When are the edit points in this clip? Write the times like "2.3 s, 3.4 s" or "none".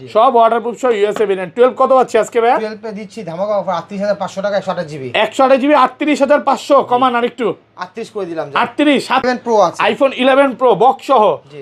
9.2 s